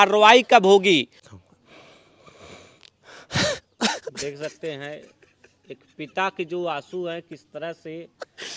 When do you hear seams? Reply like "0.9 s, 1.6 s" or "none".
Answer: 1.2 s